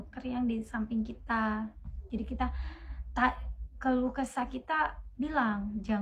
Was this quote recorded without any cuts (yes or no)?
yes